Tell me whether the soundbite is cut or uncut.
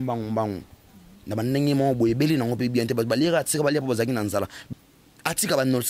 cut